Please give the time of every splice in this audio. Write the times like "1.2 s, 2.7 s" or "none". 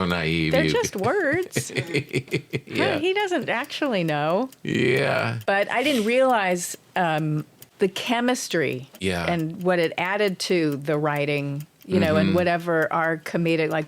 5.3 s, 7.6 s, 8.9 s